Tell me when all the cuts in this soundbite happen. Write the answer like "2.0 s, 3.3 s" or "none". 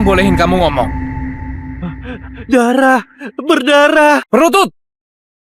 4.2 s